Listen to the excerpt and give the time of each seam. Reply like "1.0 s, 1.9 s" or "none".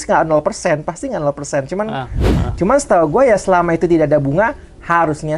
2.4 s